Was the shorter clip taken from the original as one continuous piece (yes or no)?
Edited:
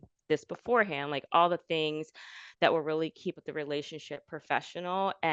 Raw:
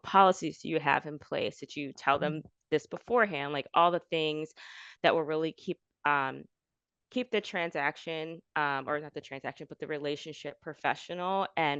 no